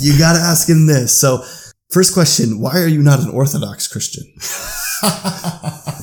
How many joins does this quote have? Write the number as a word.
one